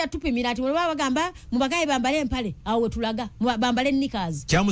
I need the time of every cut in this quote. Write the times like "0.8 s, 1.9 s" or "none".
none

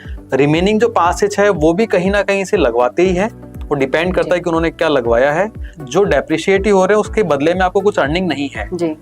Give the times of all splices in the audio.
5.7 s

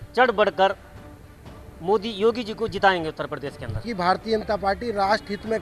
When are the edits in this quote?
3.9 s

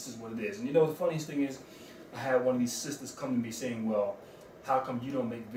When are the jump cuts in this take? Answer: none

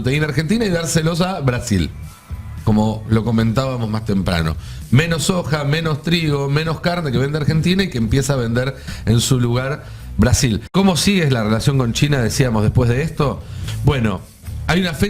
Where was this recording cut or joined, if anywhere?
10.7 s

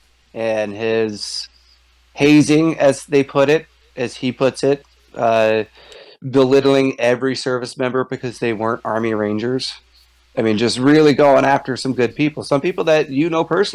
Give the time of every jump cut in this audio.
none

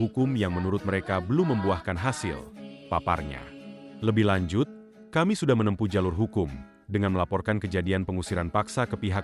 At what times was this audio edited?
3.9 s

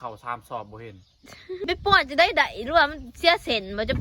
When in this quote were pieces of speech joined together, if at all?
1.6 s

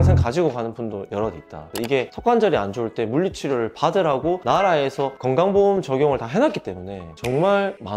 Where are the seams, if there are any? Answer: 1.7 s

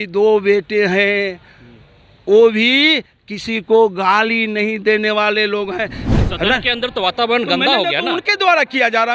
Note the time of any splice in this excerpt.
6.0 s

